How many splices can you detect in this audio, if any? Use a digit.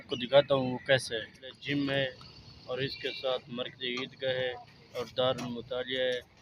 1